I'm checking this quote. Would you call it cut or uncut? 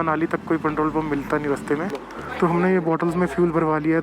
cut